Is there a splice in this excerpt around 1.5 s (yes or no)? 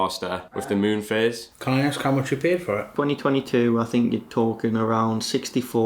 yes